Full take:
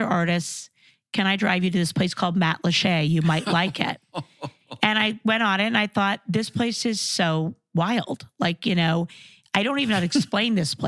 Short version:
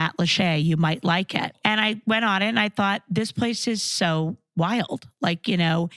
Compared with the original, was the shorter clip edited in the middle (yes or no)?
yes